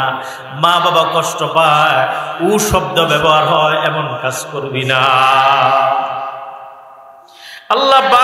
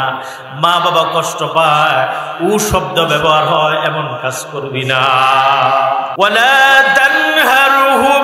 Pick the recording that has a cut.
second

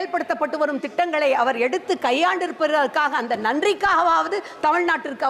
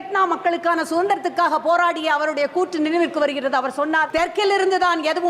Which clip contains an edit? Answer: second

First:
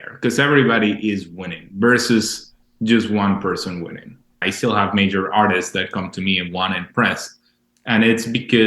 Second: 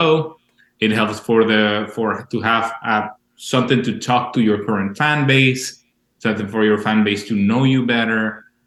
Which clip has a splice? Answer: first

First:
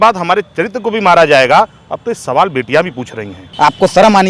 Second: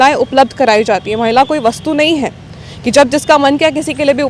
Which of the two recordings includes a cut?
first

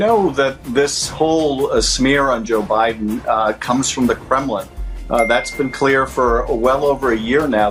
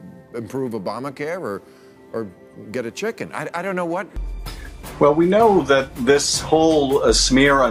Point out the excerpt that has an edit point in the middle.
second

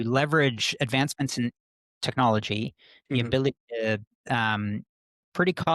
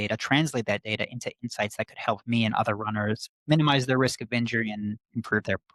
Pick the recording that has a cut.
first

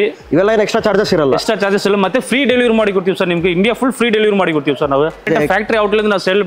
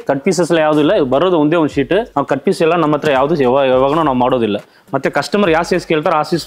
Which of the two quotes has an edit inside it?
first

